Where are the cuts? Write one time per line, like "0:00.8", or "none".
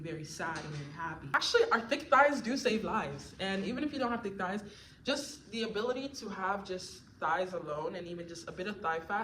0:01.3